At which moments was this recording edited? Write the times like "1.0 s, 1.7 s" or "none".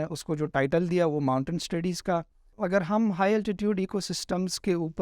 2.4 s